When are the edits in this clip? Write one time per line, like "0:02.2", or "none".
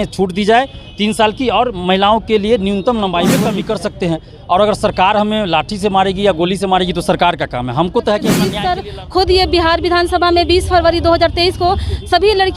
0:03.5
0:08.6